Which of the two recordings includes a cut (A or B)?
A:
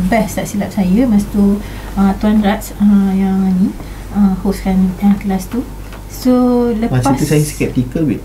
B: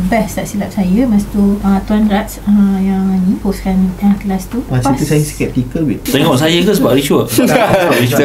B